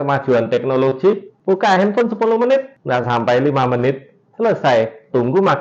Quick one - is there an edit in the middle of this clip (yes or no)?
yes